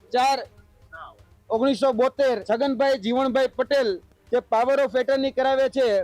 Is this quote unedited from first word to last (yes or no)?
no